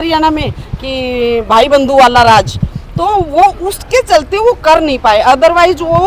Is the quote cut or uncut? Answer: uncut